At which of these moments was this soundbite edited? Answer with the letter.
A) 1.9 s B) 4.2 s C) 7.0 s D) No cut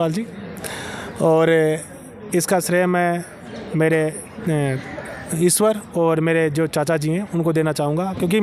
D